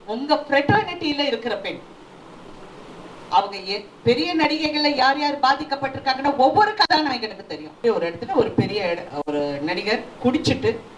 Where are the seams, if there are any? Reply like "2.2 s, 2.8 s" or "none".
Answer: 7.8 s